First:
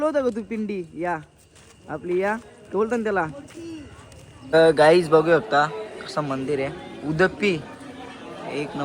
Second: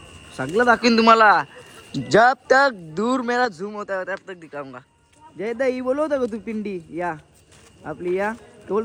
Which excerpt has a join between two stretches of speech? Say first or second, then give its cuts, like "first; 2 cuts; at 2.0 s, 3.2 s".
first; 1 cut; at 4.4 s